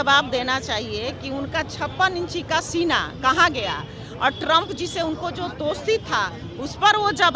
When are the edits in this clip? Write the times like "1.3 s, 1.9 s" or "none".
none

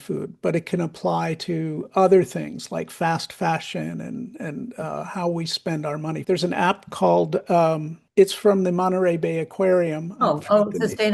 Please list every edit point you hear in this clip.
6.2 s, 7.9 s

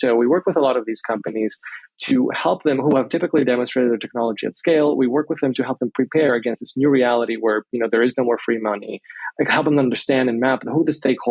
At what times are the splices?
1.9 s

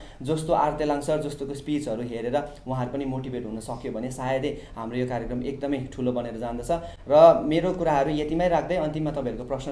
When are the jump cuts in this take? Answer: none

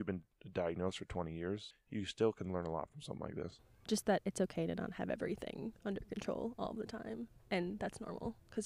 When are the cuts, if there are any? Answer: 1.7 s, 3.7 s

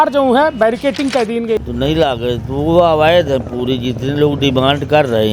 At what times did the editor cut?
1.6 s

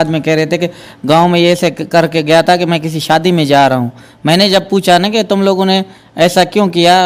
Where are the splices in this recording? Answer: none

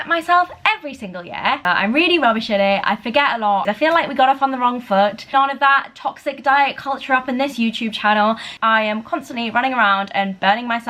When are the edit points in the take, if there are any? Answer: 1.6 s, 3.6 s, 5.3 s, 8.5 s

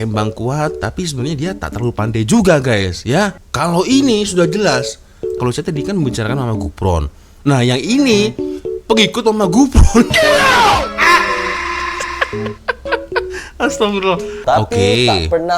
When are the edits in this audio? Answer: 3.5 s, 14.4 s

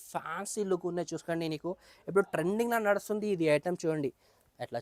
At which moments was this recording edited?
none

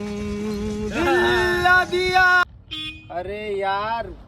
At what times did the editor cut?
2.4 s

